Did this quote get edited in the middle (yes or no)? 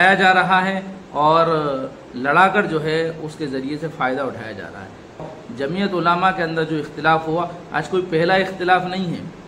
yes